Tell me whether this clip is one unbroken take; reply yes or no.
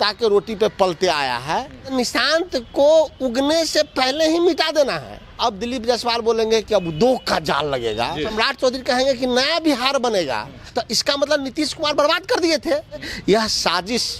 no